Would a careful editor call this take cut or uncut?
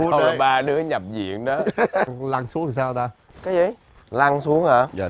cut